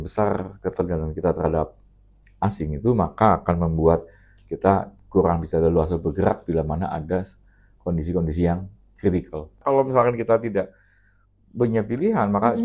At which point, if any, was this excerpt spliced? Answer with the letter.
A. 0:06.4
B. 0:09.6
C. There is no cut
B